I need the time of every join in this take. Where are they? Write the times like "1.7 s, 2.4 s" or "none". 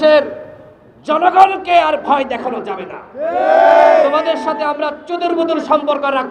none